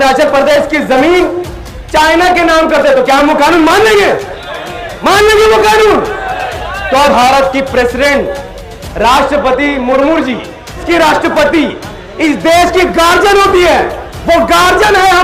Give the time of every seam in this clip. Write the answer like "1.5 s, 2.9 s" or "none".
7.1 s, 10.8 s